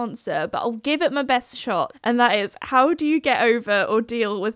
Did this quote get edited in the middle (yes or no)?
yes